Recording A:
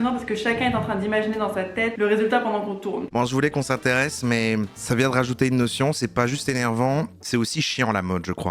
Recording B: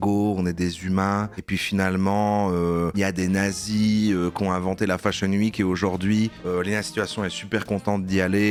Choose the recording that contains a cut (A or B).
A